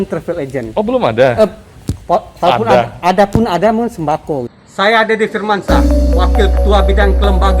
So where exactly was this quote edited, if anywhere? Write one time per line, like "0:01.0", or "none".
0:04.5